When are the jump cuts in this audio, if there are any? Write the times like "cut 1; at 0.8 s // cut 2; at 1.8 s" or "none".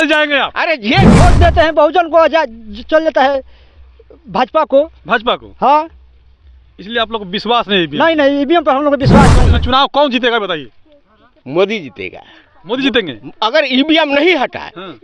cut 1; at 1.2 s // cut 2; at 9.5 s